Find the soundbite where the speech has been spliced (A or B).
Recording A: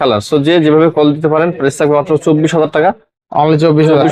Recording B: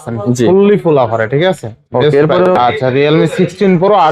B